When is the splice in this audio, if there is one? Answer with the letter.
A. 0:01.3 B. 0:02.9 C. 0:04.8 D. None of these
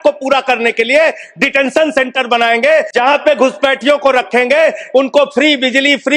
B